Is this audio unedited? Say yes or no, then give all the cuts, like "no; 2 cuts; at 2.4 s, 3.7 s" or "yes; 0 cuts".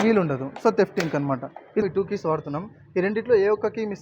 no; 1 cut; at 1.8 s